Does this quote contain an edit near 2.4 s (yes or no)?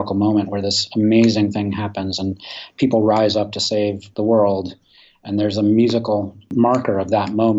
no